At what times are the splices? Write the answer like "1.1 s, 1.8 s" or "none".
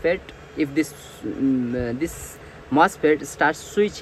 none